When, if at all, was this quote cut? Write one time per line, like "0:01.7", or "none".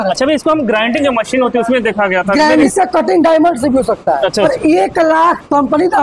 0:02.6
0:04.5